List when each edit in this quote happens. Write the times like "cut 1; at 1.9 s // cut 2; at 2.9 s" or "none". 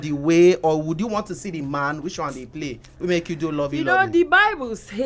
none